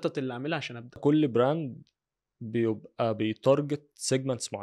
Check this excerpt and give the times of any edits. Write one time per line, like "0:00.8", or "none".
0:01.0